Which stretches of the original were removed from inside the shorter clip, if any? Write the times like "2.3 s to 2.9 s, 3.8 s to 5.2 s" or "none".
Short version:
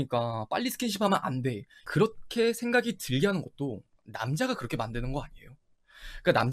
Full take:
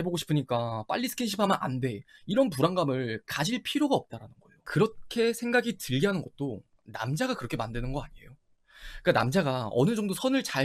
2.1 s to 4.5 s